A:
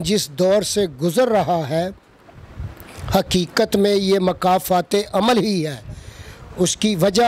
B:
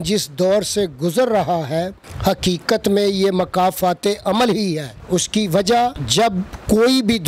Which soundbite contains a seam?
B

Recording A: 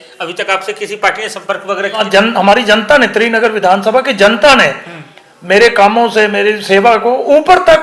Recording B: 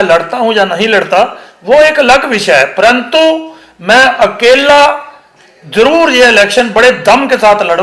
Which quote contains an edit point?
A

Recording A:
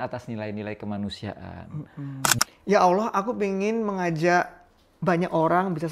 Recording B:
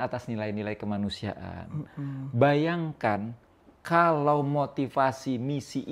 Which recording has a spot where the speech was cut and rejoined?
A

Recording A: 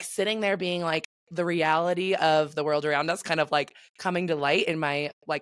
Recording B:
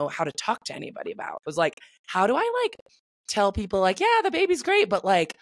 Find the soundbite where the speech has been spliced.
B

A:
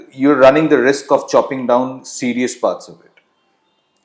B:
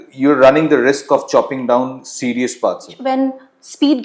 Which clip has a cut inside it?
B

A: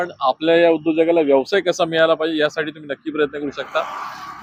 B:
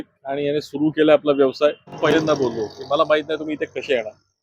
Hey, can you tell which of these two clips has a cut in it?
B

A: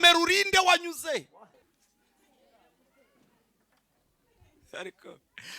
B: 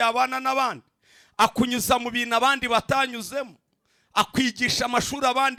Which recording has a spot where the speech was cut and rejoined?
A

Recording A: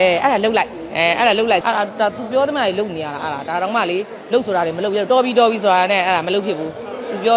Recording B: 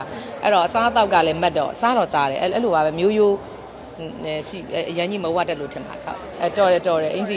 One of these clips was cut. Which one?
A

